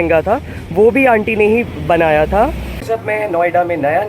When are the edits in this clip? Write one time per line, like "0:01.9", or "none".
0:02.8